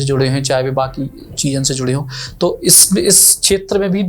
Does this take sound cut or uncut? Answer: uncut